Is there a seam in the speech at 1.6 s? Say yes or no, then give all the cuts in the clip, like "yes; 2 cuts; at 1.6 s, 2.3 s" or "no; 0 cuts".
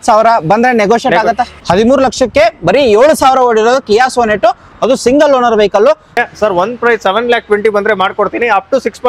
yes; 2 cuts; at 1.6 s, 6.1 s